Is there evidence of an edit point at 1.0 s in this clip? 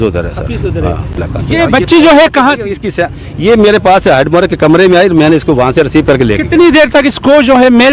no; 0 cuts

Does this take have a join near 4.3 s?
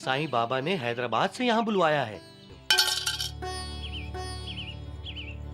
no; 1 cut; at 2.6 s

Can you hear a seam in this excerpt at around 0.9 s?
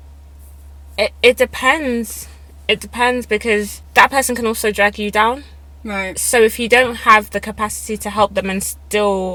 no; 0 cuts

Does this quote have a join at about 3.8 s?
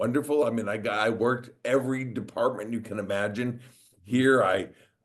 no; 0 cuts

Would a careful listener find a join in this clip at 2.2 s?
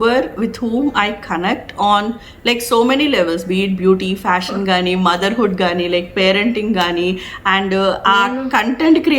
no; 0 cuts

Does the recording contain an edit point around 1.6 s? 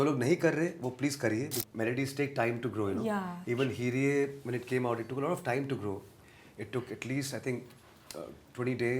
yes; 1 cut; at 1.6 s

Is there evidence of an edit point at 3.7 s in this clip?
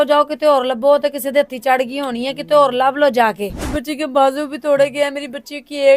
yes; 1 cut; at 3.7 s

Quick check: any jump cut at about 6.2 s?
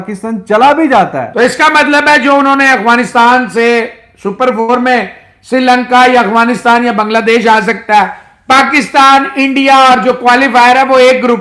no; 1 cut; at 1.2 s

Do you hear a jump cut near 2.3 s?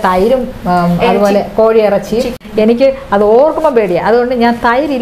yes; 1 cut; at 2.3 s

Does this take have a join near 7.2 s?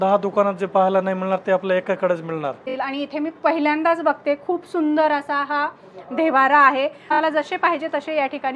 yes; 2 cuts; at 2.6 s, 7.2 s

